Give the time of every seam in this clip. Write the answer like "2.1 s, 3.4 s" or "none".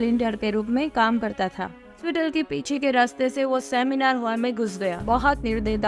2.0 s, 5.0 s